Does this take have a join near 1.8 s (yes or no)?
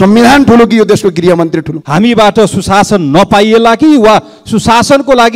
yes